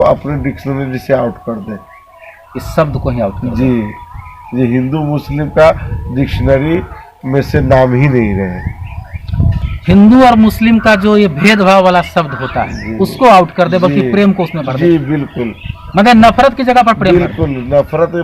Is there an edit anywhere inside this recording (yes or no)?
no